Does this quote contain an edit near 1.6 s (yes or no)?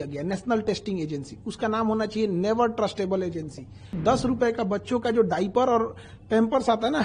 no